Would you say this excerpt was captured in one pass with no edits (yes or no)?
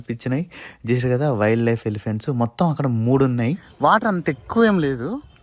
no